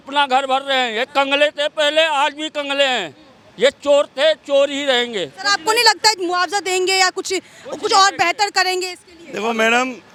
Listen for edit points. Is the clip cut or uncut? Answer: uncut